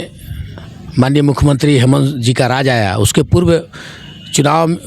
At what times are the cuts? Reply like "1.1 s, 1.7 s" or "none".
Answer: none